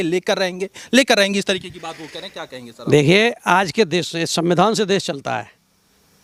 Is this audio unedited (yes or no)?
yes